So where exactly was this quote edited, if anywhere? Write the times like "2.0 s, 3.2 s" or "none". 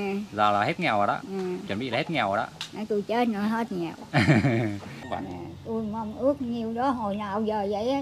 5.0 s